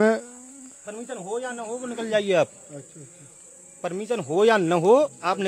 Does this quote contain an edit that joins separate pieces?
no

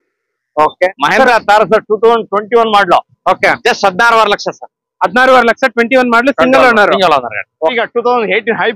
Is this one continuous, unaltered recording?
no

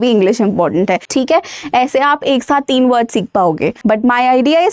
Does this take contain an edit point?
yes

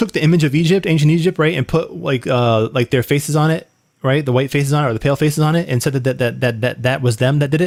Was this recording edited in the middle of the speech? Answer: no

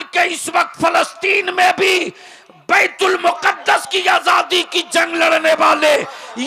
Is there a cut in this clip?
no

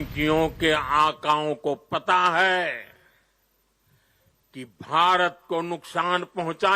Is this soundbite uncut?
yes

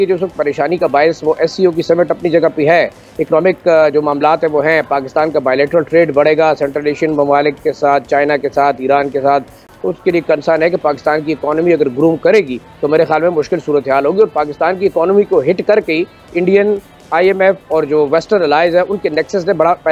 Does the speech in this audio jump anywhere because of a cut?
no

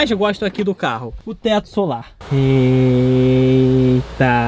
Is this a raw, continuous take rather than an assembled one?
no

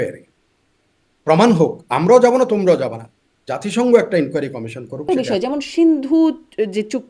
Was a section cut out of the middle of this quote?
yes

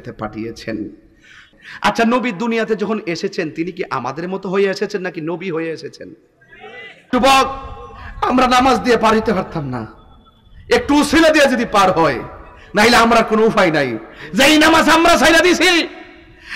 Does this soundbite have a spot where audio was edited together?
yes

